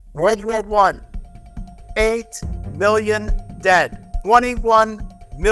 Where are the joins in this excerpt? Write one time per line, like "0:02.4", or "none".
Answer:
0:04.1